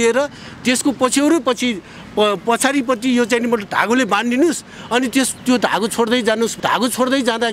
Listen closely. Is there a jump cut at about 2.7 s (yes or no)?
no